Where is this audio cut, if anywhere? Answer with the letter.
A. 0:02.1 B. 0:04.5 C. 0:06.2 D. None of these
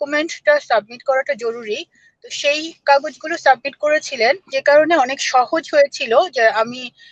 B